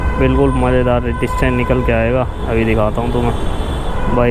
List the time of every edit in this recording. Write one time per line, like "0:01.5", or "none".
none